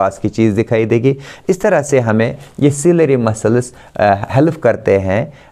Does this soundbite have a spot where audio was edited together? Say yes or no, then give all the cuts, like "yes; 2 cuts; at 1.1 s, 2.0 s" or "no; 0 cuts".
no; 0 cuts